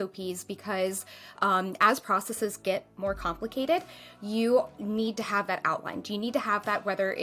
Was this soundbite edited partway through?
no; 0 cuts

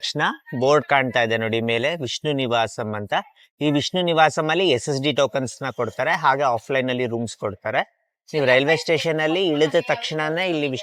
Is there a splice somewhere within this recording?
no; 0 cuts

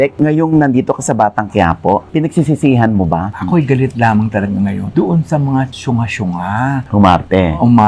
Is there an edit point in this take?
yes; 1 cut; at 3.3 s

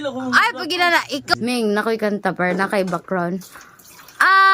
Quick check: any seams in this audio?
yes; 1 cut; at 1.3 s

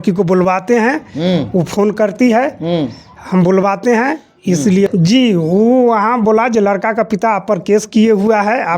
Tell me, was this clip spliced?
yes; 1 cut; at 4.9 s

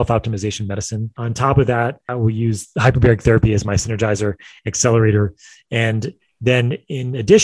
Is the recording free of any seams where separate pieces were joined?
no; 2 cuts; at 1.2 s, 2.0 s

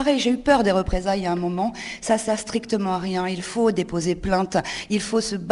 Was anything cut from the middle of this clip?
no; 0 cuts

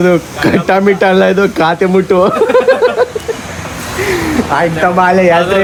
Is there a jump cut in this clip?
no; 0 cuts

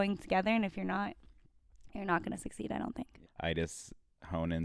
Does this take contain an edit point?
yes; 1 cut; at 3.2 s

